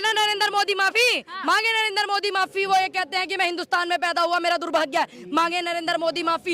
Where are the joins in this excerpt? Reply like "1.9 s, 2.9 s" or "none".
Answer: none